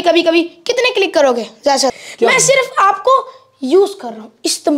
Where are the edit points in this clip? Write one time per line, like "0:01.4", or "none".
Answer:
0:02.0